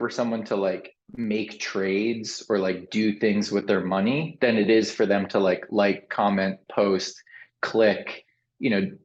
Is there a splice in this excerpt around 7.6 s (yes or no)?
no